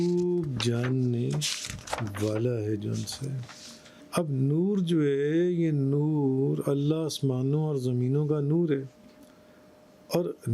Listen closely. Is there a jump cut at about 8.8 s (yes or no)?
no